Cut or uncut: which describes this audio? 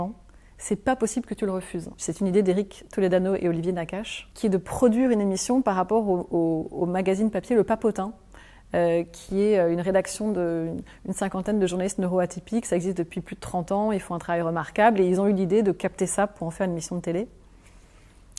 cut